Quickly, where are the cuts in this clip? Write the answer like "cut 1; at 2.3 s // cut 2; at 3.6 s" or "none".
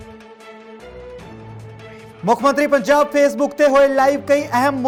none